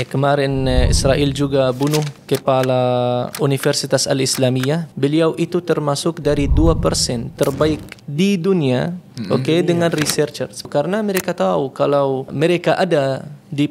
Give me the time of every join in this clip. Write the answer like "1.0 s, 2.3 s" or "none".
2.2 s, 3.3 s, 4.9 s, 10.7 s, 12.3 s